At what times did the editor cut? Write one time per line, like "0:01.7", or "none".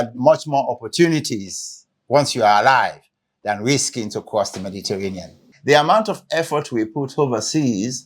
0:05.5